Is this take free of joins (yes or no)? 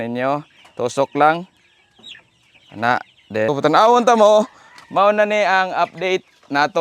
no